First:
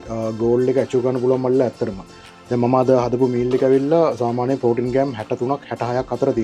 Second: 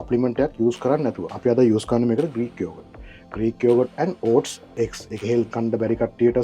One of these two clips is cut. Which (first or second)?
second